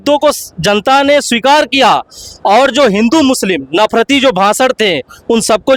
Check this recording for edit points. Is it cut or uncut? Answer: uncut